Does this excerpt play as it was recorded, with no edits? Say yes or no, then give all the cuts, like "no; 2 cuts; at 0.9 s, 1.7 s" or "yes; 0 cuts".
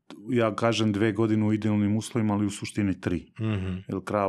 yes; 0 cuts